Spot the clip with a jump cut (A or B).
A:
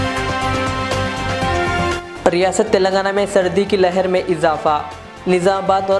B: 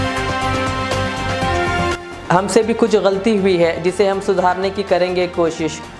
A